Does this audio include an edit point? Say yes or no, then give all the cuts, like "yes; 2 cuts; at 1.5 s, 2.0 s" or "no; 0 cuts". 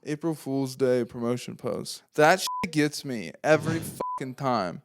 yes; 1 cut; at 2.0 s